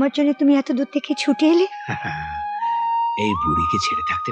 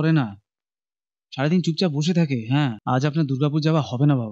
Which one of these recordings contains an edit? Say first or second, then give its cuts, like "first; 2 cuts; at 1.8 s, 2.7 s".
second; 1 cut; at 2.8 s